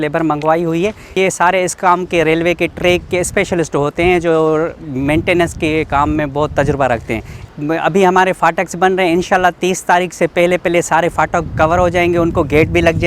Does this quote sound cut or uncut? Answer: cut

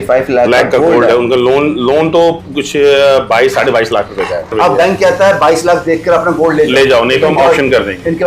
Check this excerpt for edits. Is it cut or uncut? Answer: cut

